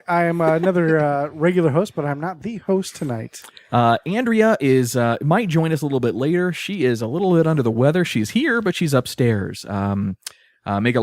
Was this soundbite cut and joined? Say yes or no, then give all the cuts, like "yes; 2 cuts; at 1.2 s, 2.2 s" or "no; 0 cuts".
no; 0 cuts